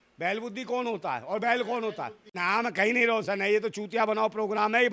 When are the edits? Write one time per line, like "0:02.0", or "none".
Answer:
0:02.4